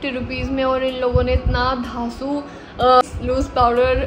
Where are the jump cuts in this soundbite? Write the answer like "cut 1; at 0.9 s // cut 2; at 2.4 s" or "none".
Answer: cut 1; at 3.0 s